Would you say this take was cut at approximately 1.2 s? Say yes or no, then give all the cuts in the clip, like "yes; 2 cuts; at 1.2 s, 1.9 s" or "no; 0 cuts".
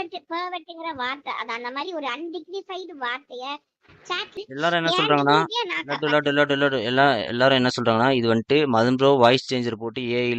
no; 1 cut; at 4.4 s